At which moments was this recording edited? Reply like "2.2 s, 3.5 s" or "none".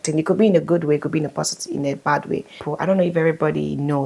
2.6 s